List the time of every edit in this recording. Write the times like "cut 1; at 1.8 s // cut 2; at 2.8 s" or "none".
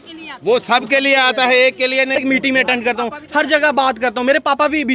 cut 1; at 2.2 s